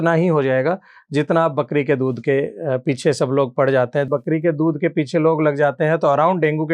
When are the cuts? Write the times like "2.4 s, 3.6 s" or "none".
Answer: 4.1 s